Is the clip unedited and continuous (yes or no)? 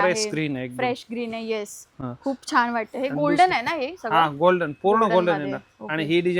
yes